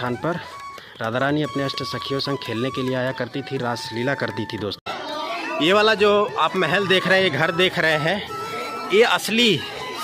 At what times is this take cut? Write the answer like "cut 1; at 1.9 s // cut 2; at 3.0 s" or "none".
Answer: cut 1; at 4.9 s

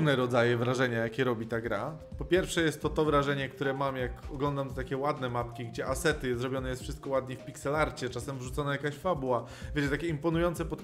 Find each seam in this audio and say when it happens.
none

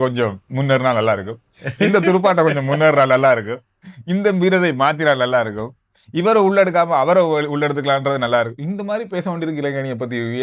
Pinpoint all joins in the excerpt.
none

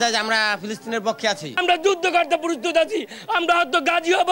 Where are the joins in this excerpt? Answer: cut 1; at 1.6 s

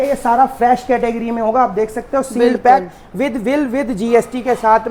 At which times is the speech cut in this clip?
none

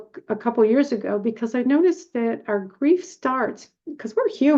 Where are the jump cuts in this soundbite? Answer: none

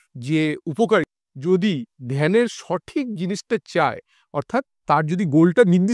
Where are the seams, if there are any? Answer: cut 1; at 1.2 s

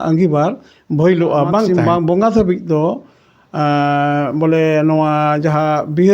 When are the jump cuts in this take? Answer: cut 1; at 1.7 s

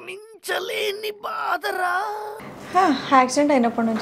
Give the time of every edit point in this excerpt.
cut 1; at 2.3 s

